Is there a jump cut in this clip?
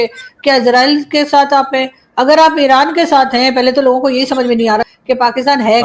yes; 1 cut; at 4.8 s

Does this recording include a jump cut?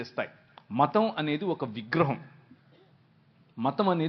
no; 0 cuts

